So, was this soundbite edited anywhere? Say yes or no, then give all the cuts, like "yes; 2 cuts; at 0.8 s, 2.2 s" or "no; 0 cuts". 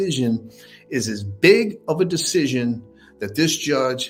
no; 0 cuts